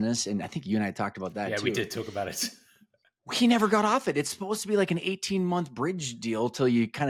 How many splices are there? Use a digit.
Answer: 0